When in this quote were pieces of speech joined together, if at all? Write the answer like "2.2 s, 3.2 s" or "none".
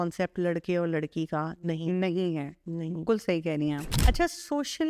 3.9 s